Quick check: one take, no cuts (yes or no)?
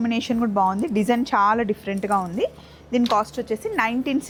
yes